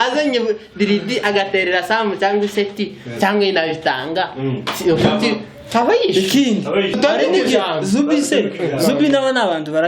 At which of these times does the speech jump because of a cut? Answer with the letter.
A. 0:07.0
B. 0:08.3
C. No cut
A